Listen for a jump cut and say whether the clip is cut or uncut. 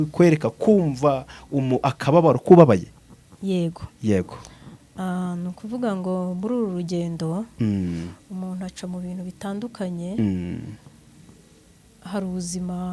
uncut